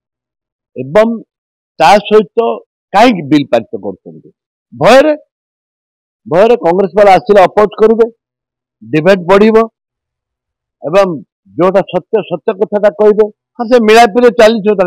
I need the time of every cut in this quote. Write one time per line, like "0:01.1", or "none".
0:13.5